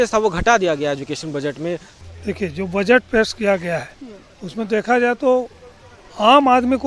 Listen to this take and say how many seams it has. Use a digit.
1